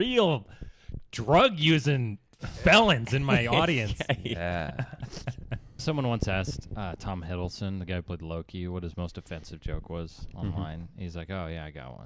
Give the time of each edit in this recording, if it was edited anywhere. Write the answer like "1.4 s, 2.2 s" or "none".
5.8 s